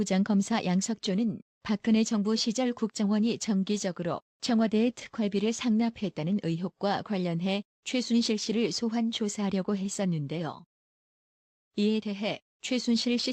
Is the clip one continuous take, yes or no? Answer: no